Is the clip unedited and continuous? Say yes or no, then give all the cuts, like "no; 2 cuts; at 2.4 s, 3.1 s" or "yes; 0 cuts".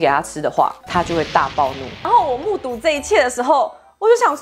no; 1 cut; at 1.9 s